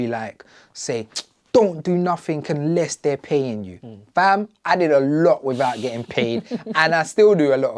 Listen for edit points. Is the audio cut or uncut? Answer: uncut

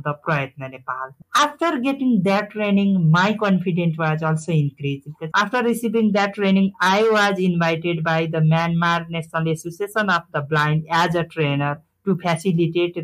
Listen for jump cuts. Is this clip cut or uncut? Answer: cut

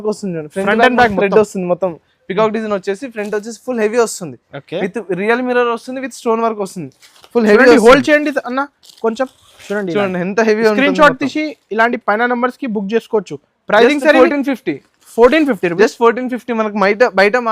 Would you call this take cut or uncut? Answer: uncut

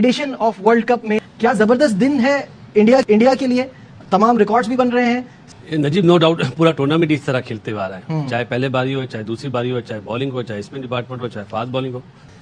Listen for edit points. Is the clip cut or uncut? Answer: uncut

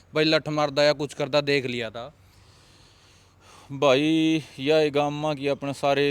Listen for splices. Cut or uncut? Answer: uncut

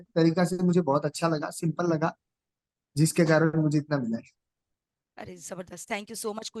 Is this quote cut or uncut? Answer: uncut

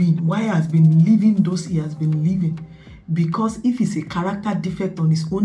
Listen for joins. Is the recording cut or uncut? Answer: uncut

